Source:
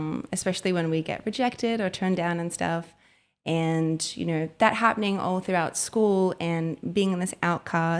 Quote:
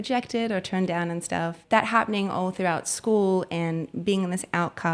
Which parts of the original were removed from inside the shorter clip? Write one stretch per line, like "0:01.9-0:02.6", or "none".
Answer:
0:02.9-0:04.5